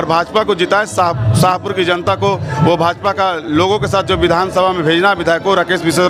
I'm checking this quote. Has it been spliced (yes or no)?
no